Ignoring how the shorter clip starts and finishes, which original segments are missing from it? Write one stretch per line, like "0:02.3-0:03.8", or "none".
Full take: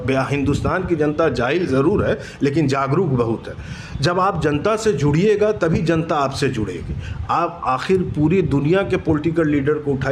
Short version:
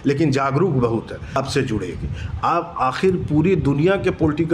0:03.7-0:06.2